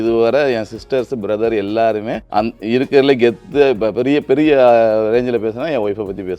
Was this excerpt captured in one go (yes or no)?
no